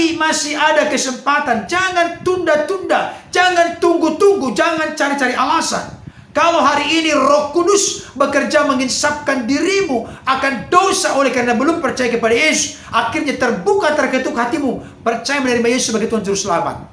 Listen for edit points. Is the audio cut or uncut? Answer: uncut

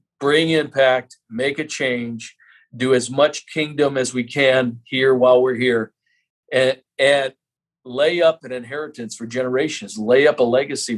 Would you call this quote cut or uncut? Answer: uncut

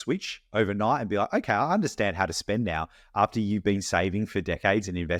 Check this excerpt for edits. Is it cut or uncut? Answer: uncut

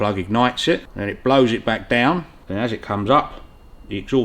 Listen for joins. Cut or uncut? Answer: cut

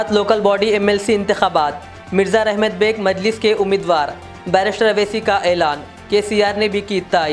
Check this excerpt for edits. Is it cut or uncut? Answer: uncut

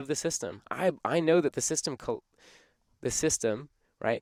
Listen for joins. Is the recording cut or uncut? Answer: uncut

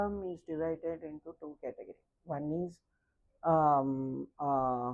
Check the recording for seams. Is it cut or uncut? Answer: uncut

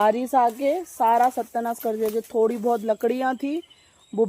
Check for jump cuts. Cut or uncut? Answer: uncut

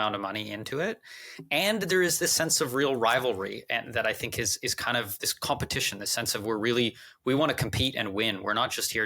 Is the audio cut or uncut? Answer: uncut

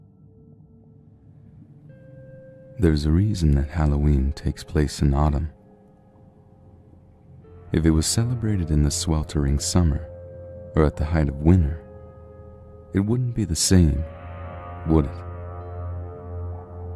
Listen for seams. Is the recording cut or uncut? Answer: uncut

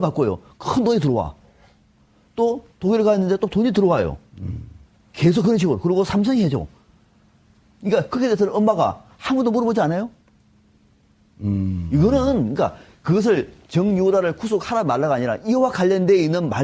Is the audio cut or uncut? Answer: cut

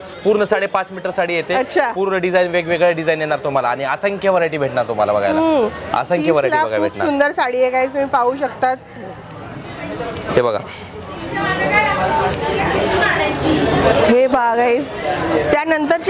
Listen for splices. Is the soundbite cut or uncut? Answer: uncut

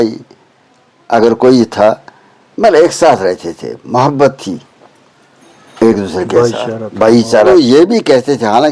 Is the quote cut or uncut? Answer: cut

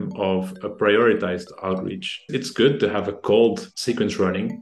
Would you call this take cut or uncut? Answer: cut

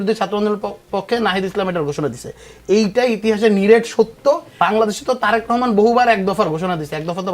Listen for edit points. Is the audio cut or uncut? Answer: cut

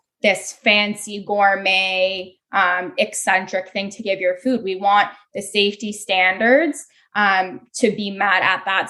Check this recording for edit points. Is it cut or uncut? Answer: uncut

